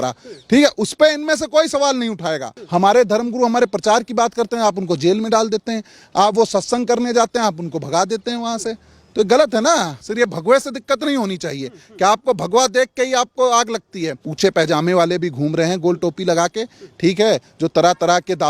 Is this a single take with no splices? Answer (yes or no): no